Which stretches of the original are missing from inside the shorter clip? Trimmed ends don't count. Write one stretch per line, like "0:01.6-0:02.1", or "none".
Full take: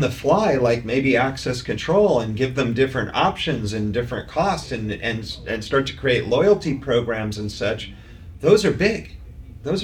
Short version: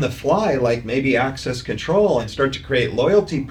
0:02.3-0:05.6

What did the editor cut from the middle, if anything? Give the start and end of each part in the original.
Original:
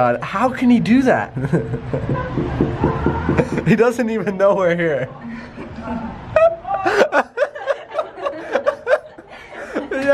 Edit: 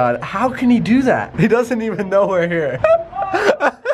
0:01.3-0:03.6
0:05.0-0:06.3

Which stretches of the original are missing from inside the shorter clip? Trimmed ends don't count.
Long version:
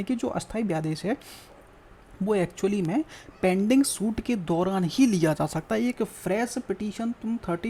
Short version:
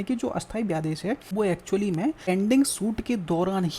0:01.3-0:02.2
0:03.2-0:03.5

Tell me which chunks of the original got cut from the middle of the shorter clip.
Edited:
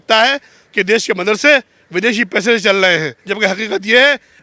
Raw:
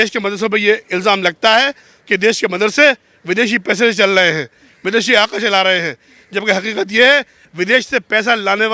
0:04.5-0:06.2

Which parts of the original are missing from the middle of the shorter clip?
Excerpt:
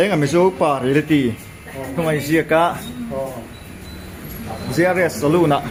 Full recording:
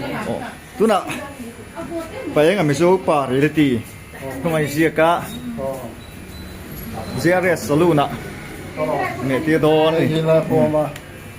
none

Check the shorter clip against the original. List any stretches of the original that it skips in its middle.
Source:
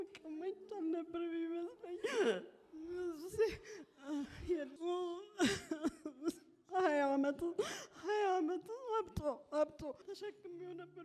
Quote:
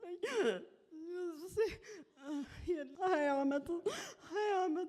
0:04.7-0:06.6

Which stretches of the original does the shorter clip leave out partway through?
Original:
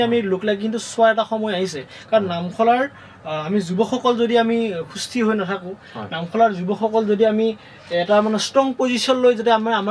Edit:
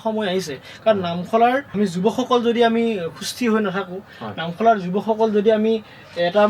0:03.0-0:03.4

